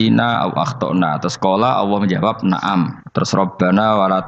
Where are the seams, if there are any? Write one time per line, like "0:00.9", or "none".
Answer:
0:03.0